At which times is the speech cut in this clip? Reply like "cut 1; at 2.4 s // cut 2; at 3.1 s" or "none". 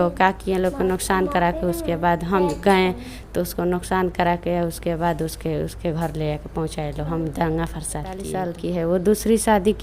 cut 1; at 8.6 s

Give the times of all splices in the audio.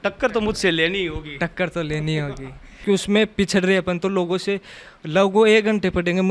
cut 1; at 2.7 s

